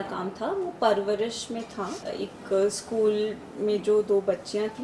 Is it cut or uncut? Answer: cut